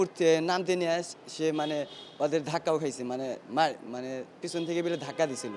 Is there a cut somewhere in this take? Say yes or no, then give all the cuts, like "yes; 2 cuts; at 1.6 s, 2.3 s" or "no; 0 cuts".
no; 0 cuts